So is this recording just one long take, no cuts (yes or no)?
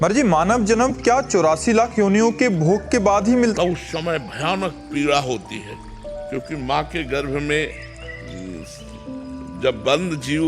no